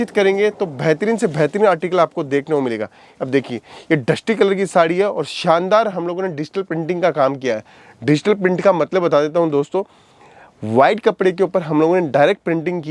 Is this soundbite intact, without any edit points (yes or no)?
yes